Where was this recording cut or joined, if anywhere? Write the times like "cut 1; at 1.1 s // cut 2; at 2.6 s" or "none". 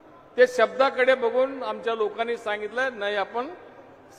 none